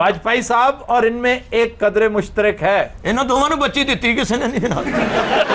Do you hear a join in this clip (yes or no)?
no